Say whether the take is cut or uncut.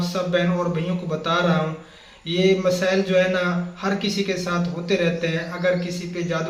uncut